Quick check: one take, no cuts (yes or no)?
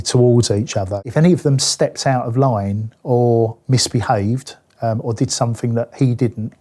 no